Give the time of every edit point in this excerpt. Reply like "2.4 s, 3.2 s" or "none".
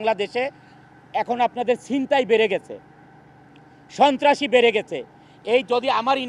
none